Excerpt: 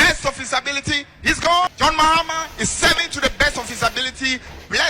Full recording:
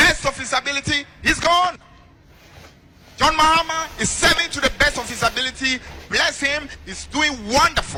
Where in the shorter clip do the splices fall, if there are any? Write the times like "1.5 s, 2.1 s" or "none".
1.7 s